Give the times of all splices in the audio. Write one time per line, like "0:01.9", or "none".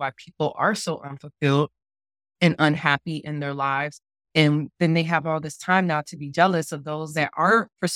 none